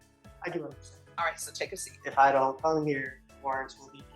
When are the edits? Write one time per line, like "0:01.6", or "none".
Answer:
0:01.9
0:03.2